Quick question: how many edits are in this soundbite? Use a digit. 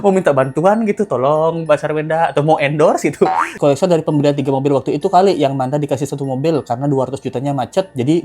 1